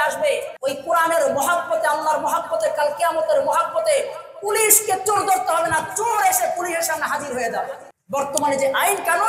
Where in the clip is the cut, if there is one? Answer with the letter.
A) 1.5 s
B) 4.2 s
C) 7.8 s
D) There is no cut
C